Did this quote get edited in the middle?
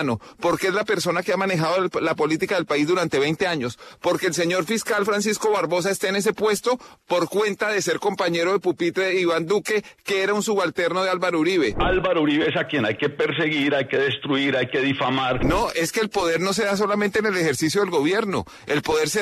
yes; 2 cuts; at 11.8 s, 15.4 s

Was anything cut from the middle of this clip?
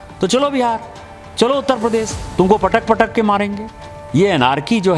yes; 1 cut; at 2.2 s

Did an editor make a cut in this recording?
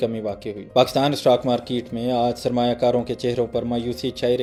no; 0 cuts

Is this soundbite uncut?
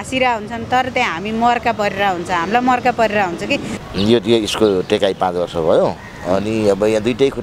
no; 1 cut; at 3.7 s

